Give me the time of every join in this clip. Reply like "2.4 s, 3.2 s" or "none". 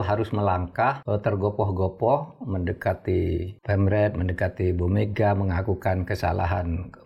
1.0 s, 3.5 s

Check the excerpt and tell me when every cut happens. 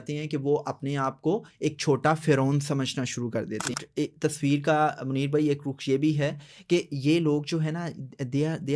3.7 s

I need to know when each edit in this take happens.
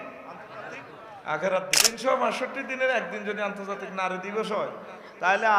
1.9 s

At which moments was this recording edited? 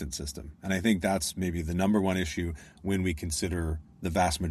none

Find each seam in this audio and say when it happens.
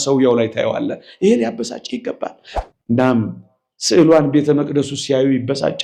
2.5 s

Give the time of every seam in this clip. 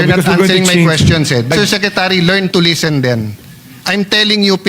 1.5 s

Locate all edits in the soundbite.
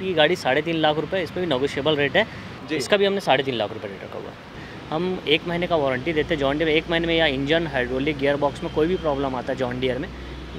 2.5 s, 4.6 s

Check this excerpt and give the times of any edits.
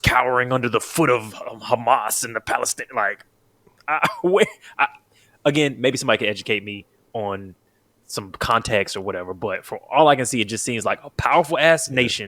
none

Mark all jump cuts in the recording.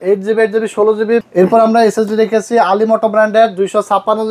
1.2 s

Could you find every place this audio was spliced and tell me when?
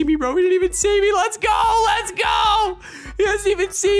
none

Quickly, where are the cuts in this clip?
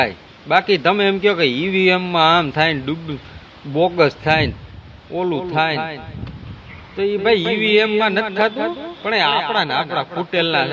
none

